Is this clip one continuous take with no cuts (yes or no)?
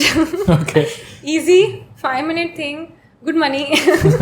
yes